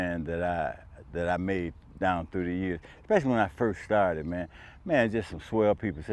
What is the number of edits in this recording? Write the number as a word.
zero